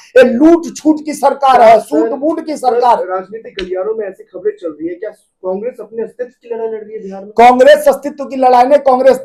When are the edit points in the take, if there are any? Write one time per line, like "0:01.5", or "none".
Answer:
none